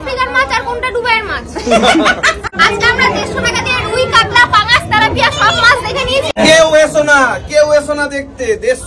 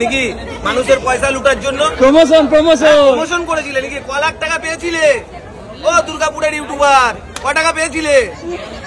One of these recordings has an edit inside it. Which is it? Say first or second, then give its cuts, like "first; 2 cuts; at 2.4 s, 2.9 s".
first; 2 cuts; at 2.5 s, 6.3 s